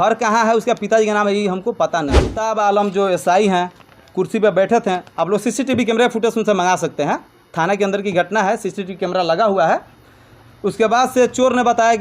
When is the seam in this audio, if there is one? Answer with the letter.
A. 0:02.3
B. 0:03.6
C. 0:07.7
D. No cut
A